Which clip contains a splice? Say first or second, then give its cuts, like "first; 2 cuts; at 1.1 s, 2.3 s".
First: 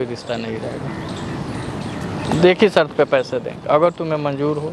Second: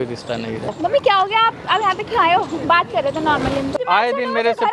second; 2 cuts; at 0.7 s, 3.8 s